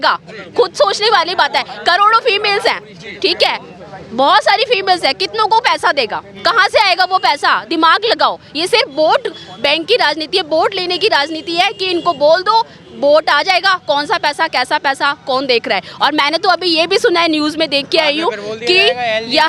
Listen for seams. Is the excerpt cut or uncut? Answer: uncut